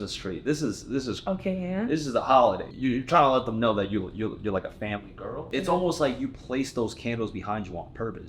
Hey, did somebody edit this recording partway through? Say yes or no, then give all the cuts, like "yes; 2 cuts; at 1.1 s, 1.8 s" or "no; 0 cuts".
yes; 2 cuts; at 2.7 s, 5.5 s